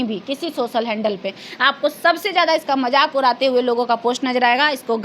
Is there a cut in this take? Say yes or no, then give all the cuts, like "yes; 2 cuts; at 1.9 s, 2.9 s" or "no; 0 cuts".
no; 0 cuts